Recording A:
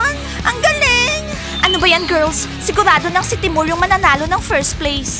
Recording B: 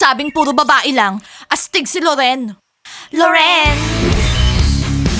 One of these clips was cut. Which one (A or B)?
B